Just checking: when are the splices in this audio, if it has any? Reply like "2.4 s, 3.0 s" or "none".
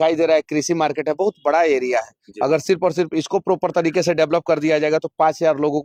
none